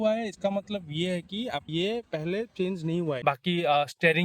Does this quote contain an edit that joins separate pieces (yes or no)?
yes